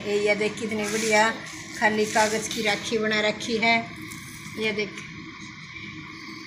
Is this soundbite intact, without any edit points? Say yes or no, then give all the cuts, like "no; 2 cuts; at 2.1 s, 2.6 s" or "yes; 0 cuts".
yes; 0 cuts